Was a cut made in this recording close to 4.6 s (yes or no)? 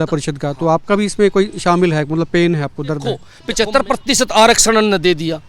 no